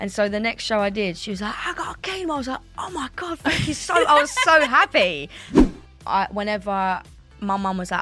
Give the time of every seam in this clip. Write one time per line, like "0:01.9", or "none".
0:05.5